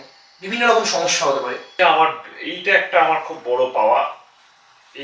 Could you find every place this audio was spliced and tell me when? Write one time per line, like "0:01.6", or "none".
0:01.7